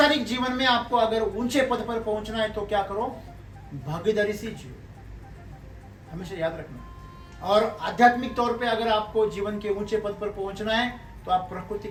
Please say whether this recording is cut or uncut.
uncut